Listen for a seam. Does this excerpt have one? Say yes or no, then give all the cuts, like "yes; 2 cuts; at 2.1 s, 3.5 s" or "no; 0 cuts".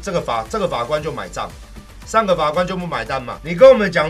no; 0 cuts